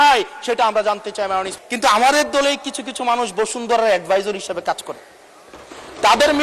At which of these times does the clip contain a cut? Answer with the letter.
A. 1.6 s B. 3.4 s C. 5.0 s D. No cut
A